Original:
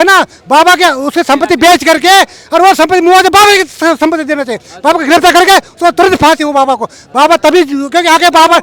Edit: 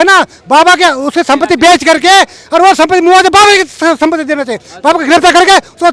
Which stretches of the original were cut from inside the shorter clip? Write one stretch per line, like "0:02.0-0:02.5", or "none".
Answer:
none